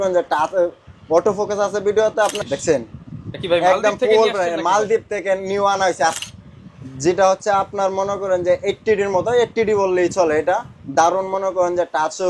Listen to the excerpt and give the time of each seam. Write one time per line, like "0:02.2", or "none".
0:02.4
0:06.2